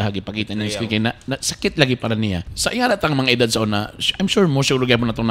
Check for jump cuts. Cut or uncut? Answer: cut